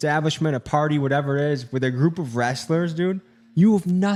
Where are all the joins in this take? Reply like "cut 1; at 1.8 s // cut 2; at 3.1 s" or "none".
none